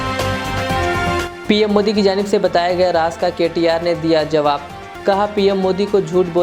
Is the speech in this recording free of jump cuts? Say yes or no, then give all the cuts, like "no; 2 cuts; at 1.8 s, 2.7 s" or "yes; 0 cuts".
no; 1 cut; at 1.2 s